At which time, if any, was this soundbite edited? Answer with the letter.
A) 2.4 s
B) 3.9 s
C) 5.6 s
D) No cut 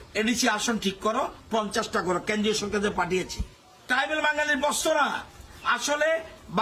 B